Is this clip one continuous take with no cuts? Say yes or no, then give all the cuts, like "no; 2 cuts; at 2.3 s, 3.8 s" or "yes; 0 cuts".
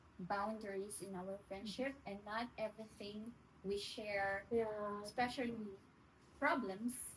yes; 0 cuts